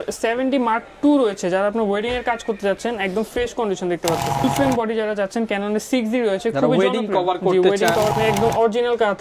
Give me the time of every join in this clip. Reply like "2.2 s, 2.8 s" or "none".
4.4 s, 8.1 s